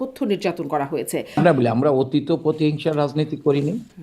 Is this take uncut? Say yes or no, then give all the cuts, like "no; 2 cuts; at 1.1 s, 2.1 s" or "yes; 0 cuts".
no; 1 cut; at 1.4 s